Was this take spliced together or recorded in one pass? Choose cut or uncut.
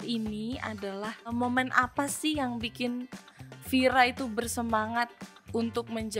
cut